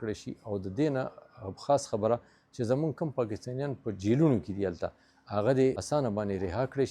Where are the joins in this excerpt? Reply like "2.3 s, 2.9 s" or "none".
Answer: 5.8 s